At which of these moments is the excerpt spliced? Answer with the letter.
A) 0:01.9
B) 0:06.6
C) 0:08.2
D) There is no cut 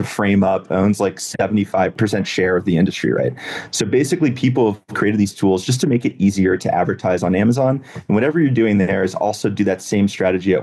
A